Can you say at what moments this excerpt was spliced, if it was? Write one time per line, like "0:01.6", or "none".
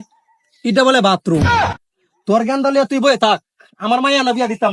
none

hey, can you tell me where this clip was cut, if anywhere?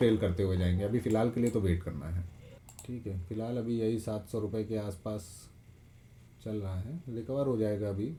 none

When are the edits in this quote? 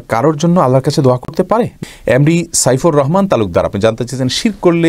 0:01.8

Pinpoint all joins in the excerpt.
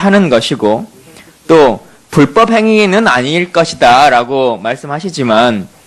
0:04.1

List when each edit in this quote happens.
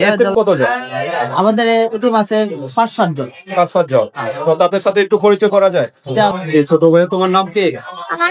0:06.4

